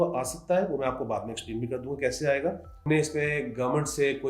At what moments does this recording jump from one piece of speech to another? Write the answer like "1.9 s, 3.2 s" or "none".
2.9 s